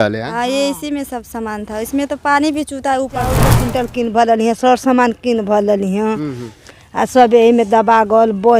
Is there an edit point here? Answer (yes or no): yes